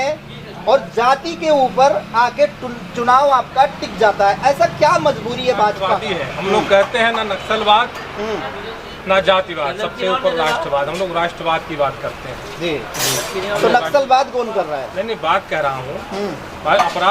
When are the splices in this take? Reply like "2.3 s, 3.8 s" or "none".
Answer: 6.1 s